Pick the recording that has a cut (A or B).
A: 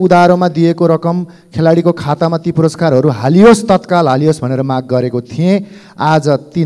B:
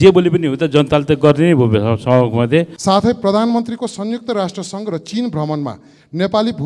B